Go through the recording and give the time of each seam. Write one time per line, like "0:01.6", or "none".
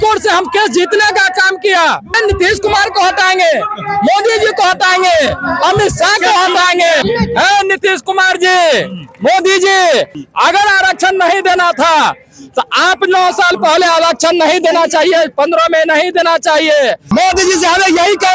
0:02.1
0:07.0
0:17.0